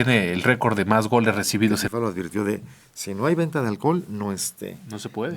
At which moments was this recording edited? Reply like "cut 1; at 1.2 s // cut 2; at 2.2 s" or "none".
cut 1; at 1.8 s